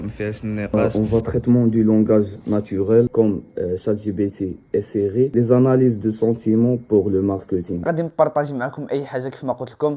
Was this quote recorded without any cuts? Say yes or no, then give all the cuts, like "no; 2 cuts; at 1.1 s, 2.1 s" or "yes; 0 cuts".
no; 3 cuts; at 0.7 s, 3.1 s, 7.8 s